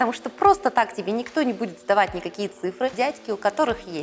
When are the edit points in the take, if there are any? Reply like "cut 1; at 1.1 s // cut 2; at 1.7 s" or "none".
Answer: cut 1; at 2.9 s